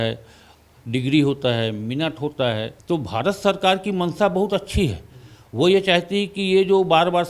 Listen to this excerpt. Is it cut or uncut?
cut